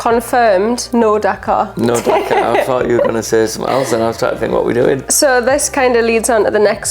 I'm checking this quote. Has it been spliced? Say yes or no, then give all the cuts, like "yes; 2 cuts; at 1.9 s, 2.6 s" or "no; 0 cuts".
no; 0 cuts